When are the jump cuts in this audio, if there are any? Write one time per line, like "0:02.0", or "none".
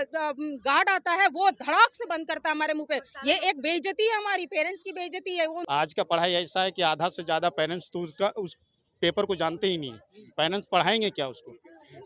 0:05.6